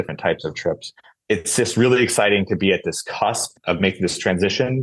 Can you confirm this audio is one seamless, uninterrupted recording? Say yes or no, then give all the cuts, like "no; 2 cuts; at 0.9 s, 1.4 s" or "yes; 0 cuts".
no; 1 cut; at 1.0 s